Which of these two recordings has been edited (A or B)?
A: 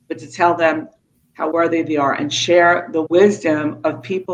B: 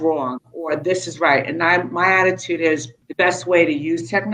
B